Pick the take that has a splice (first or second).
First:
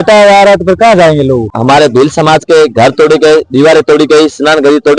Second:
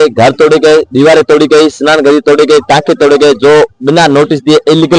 first